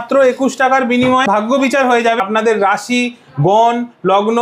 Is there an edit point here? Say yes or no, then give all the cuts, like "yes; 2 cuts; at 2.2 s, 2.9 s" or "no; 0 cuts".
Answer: yes; 2 cuts; at 1.3 s, 2.2 s